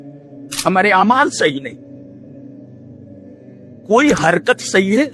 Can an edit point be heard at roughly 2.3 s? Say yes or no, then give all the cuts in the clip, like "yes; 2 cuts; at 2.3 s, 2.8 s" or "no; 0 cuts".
yes; 2 cuts; at 2.3 s, 3.9 s